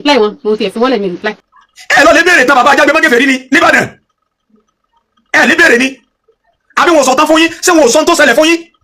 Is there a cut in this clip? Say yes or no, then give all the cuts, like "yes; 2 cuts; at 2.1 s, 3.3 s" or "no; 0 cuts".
yes; 1 cut; at 1.5 s